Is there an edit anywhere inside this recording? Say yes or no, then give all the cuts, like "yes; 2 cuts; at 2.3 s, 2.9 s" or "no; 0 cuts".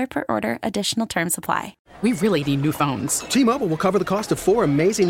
yes; 1 cut; at 1.8 s